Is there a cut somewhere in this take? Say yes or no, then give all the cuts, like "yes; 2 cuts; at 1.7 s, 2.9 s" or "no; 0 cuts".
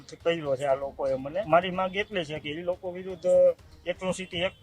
yes; 1 cut; at 1.5 s